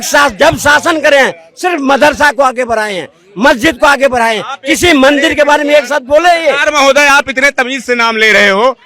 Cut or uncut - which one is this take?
uncut